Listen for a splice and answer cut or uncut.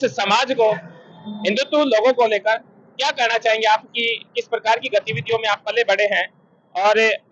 uncut